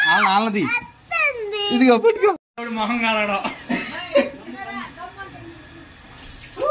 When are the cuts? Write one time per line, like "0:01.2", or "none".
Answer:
0:02.5